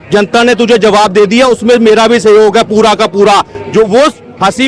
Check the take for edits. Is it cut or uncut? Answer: uncut